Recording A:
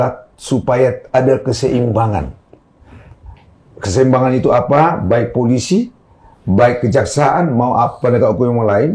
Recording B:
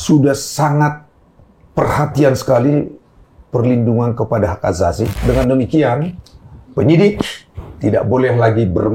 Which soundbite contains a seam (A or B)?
B